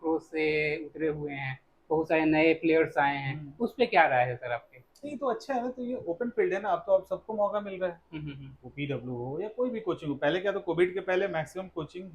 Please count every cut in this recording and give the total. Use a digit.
0